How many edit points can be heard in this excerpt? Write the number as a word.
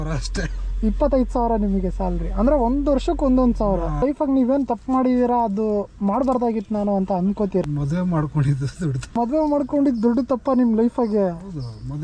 three